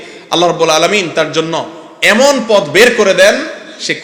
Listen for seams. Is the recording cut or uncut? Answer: uncut